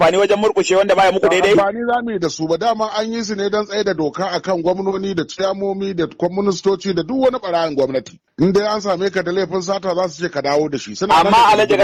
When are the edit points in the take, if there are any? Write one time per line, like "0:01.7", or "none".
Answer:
none